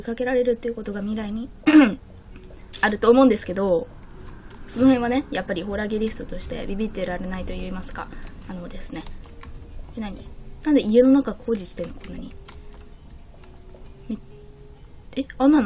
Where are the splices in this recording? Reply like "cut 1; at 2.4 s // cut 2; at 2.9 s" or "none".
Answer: none